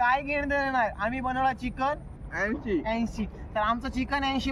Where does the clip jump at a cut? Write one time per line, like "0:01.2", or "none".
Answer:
none